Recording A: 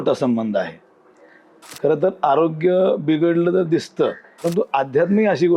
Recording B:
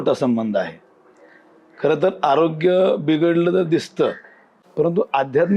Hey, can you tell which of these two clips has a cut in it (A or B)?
A